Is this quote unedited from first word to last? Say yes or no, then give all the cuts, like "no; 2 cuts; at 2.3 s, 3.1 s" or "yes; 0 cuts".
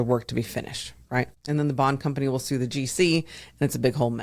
no; 1 cut; at 1.4 s